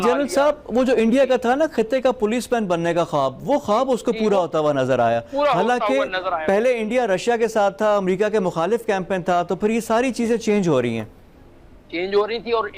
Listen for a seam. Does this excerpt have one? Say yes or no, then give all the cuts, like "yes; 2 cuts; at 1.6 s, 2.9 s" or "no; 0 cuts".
no; 0 cuts